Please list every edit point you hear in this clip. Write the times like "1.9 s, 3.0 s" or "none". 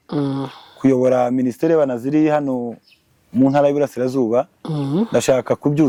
none